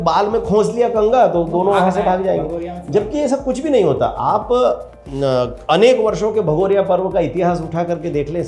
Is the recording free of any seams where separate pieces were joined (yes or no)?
yes